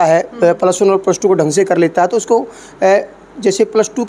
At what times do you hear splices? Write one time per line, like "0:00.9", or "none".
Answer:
none